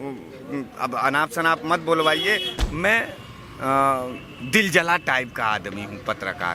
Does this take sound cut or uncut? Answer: cut